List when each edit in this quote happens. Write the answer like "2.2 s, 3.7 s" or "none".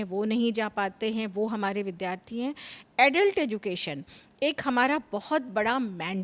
none